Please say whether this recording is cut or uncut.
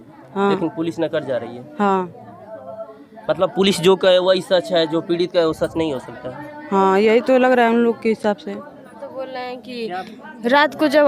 cut